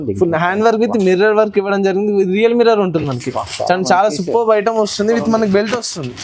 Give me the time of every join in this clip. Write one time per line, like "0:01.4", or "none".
none